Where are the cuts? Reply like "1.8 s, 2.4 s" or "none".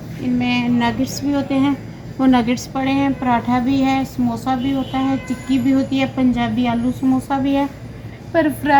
none